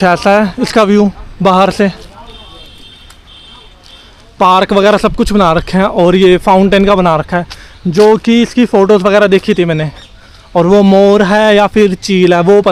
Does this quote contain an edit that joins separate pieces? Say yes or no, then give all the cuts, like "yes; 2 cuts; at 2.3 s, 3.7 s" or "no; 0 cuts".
no; 0 cuts